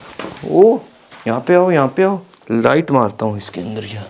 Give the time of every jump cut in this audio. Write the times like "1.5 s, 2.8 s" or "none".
2.3 s